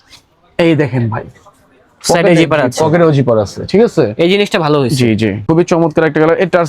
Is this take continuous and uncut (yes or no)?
no